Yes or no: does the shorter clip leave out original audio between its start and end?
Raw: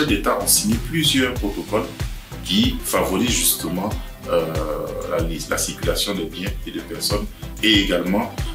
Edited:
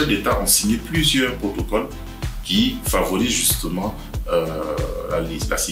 no